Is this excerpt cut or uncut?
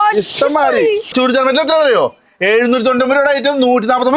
cut